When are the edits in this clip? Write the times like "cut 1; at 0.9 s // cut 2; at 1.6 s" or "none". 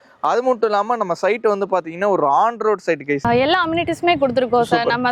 cut 1; at 3.1 s